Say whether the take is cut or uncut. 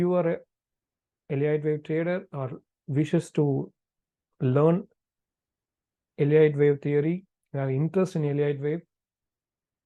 uncut